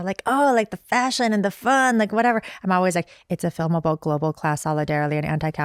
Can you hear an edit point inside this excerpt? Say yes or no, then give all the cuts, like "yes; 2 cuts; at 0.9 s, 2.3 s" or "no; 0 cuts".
no; 0 cuts